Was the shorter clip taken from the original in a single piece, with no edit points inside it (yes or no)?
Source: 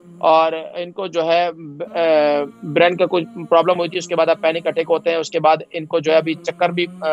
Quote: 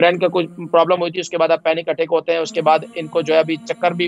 yes